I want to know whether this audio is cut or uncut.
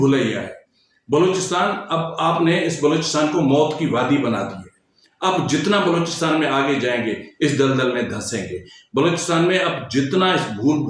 uncut